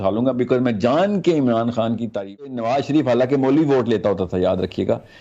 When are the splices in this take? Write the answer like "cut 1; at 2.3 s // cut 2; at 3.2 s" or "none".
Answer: cut 1; at 2.6 s